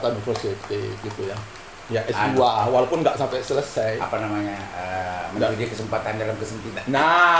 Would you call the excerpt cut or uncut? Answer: uncut